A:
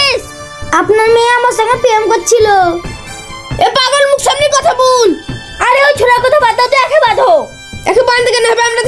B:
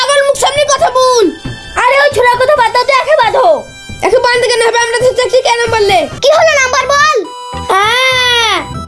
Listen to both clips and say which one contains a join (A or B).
B